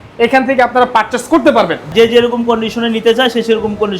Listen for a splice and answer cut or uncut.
cut